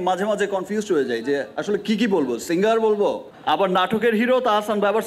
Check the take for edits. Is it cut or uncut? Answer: cut